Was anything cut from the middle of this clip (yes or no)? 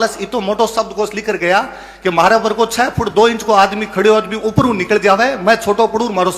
no